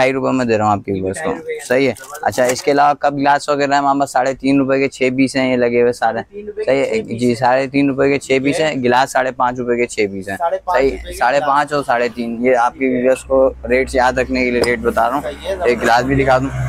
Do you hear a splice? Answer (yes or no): no